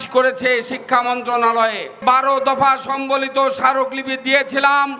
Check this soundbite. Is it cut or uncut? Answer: cut